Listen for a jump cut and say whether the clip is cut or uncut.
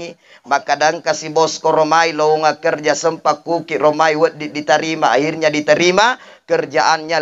uncut